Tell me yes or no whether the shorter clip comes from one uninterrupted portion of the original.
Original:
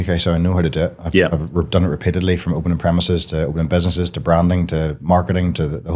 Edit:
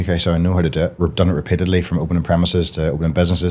no